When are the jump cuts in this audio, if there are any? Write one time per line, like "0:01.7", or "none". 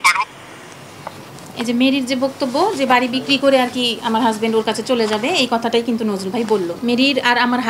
0:06.8